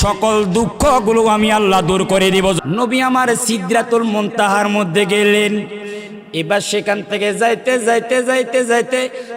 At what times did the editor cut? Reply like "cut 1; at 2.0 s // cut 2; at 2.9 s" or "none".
cut 1; at 2.6 s

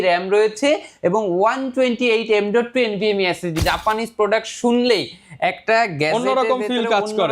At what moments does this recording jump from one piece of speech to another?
cut 1; at 3.6 s

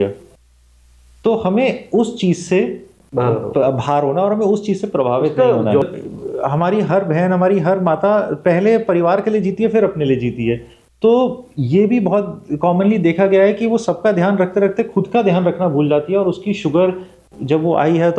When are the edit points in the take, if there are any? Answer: cut 1; at 5.8 s

